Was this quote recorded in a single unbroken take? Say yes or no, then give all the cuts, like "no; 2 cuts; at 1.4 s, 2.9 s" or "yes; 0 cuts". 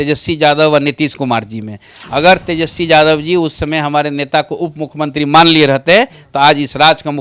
yes; 0 cuts